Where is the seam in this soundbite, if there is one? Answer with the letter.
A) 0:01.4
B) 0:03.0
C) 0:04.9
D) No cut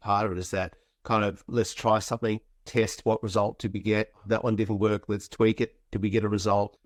D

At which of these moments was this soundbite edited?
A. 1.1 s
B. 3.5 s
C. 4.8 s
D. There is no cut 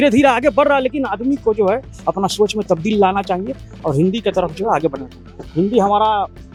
D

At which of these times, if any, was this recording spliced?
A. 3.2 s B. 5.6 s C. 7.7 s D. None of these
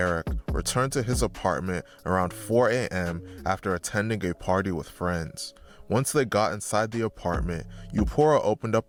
D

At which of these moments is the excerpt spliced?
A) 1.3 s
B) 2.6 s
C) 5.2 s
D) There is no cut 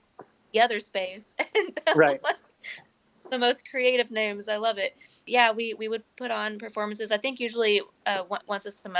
C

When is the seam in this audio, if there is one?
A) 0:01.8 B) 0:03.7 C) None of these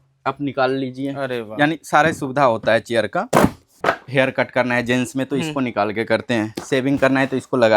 B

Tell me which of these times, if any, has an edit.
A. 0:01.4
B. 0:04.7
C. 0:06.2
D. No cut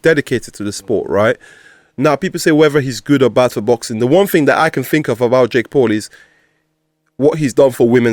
D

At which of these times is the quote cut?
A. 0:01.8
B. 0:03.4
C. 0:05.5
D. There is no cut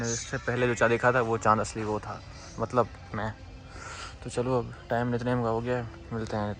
D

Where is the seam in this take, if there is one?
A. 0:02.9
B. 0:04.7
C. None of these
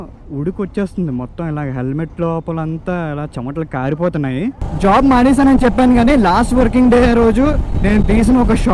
B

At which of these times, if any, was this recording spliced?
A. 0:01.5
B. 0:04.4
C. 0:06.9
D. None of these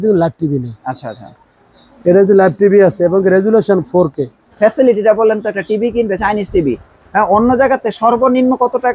B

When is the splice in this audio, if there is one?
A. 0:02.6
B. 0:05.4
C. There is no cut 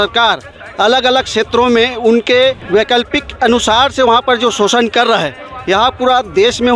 A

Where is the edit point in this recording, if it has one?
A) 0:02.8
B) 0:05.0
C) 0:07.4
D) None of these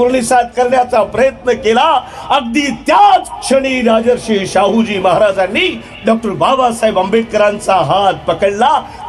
D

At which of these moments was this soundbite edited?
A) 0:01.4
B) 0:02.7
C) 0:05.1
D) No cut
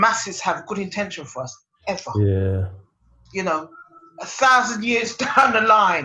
D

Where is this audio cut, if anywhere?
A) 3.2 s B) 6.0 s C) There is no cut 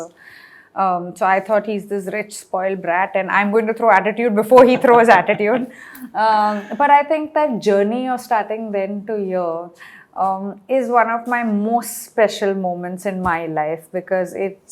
C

